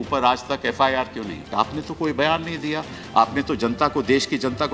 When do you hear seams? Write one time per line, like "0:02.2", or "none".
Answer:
0:01.5